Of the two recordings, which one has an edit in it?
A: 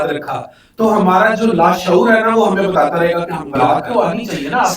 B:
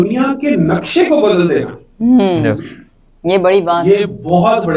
A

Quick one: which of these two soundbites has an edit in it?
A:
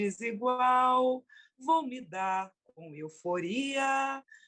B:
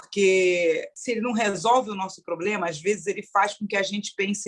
B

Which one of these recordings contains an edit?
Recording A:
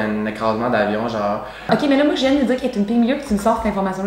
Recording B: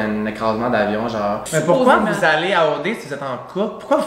B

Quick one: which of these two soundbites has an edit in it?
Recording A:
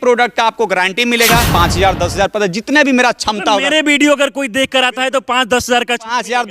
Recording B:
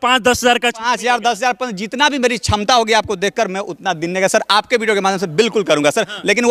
A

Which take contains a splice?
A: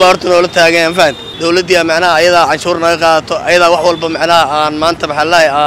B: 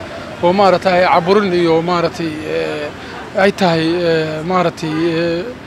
A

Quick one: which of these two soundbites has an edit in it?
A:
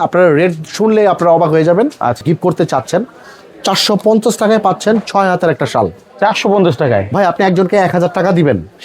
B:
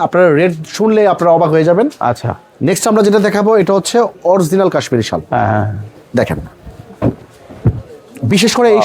A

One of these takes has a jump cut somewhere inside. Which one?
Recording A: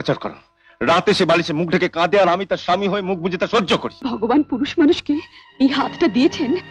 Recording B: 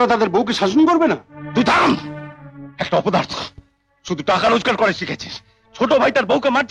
A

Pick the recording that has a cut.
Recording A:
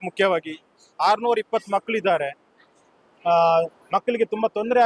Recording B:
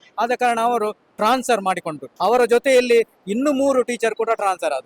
B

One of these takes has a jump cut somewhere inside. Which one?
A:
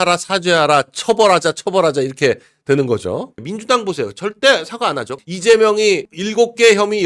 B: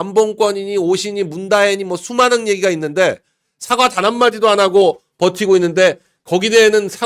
A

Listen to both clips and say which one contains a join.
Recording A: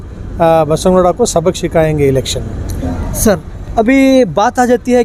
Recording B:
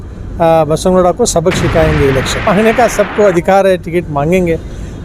B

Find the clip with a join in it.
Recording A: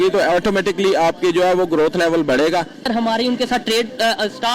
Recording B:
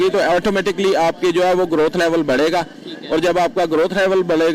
A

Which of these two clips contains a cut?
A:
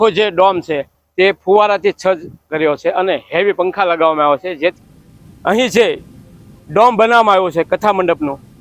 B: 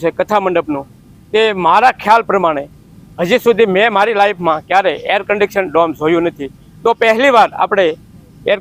A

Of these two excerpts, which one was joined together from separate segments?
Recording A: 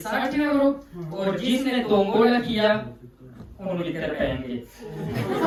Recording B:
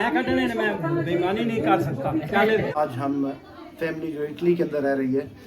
B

